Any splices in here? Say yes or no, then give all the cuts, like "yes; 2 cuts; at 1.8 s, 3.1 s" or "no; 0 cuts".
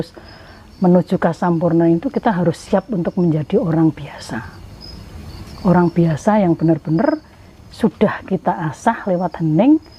no; 0 cuts